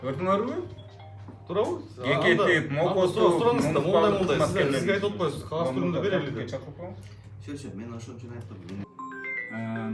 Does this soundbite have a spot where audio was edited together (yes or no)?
yes